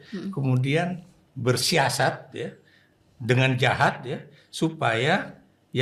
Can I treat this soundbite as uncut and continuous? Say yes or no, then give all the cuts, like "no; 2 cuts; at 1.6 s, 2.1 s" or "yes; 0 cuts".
yes; 0 cuts